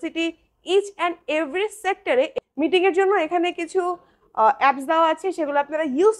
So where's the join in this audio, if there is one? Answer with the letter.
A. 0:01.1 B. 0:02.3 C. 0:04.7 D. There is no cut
B